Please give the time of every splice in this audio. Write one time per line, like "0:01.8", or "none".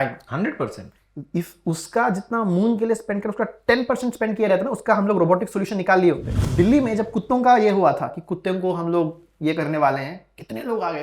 0:06.3